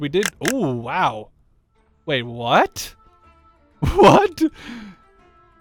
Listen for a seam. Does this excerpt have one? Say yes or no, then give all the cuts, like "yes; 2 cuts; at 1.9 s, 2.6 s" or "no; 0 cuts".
no; 0 cuts